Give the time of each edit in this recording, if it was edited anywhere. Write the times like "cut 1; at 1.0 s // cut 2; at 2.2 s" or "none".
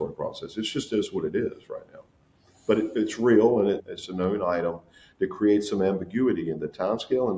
cut 1; at 3.8 s